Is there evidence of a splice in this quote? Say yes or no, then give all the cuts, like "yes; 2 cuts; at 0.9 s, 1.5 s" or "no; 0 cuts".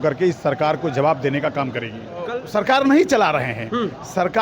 yes; 1 cut; at 2.4 s